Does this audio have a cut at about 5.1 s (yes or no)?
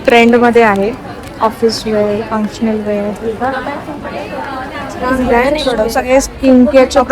yes